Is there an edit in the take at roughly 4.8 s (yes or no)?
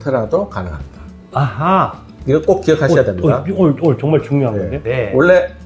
yes